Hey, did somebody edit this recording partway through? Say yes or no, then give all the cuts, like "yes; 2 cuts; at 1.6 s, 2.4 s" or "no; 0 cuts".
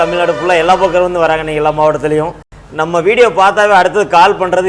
no; 0 cuts